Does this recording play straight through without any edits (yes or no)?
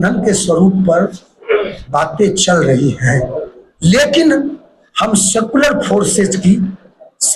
yes